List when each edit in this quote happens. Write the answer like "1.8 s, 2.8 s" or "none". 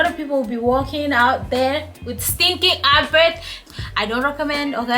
3.6 s

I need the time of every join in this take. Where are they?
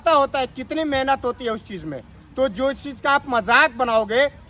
none

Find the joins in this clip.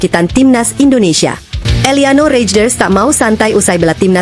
1.5 s

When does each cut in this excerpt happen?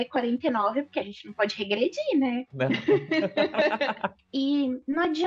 4.1 s

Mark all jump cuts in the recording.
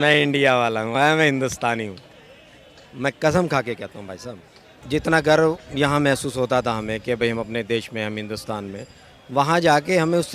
4.8 s

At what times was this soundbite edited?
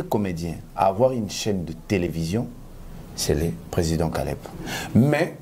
4.5 s

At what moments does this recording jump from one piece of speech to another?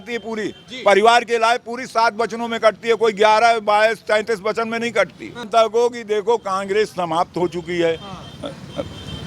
5.5 s

